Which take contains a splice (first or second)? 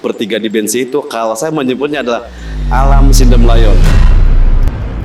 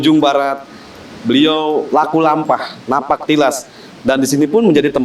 second